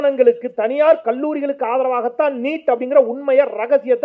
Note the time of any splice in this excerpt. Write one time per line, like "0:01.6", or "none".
none